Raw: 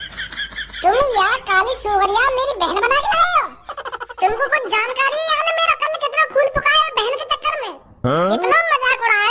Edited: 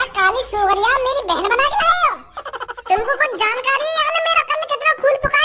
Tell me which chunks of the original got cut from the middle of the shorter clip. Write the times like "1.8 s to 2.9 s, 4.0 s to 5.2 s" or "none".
none